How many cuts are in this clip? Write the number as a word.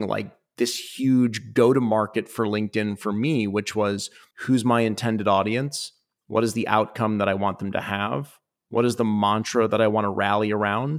zero